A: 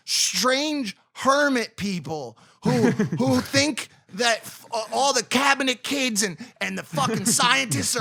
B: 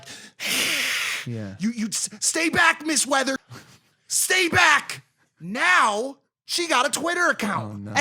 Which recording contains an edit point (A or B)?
B